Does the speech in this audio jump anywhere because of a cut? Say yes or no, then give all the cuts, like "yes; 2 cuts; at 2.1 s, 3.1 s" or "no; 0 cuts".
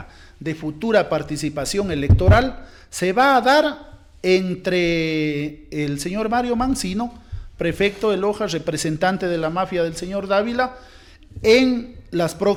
no; 0 cuts